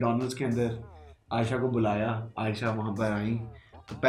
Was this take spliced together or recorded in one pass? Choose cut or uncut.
uncut